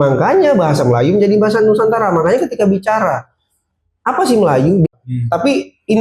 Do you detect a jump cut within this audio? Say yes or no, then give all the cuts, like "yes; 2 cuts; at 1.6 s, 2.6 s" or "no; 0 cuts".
yes; 1 cut; at 4.9 s